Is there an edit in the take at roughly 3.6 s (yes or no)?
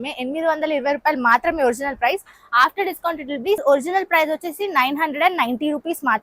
yes